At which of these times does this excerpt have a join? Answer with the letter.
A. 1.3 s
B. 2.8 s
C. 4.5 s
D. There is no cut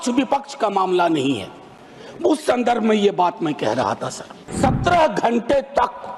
C